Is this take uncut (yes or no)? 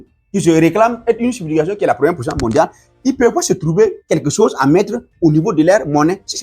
no